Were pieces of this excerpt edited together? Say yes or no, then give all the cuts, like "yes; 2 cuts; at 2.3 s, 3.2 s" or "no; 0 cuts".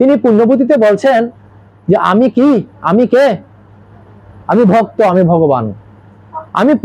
no; 0 cuts